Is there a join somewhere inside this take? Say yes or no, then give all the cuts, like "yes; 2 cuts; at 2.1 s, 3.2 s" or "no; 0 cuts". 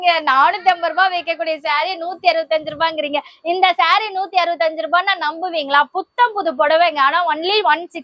no; 0 cuts